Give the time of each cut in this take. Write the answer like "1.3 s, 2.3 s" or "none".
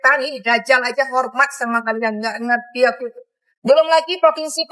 none